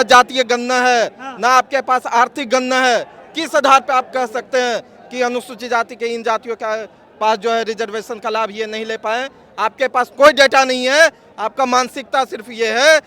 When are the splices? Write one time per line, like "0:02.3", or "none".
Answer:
none